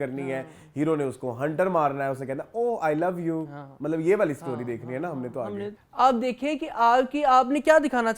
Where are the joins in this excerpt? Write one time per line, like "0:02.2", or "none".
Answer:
0:05.8